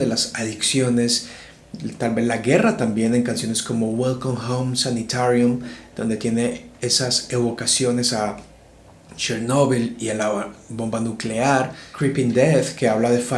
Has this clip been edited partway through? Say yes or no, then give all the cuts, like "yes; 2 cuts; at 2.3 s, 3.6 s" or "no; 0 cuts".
yes; 1 cut; at 11.8 s